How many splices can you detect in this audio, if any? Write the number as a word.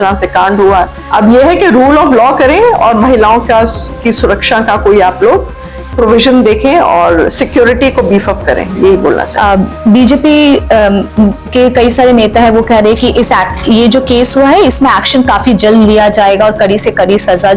zero